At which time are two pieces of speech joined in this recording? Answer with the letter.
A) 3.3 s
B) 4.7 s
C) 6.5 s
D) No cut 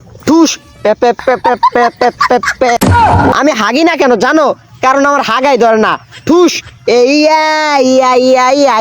A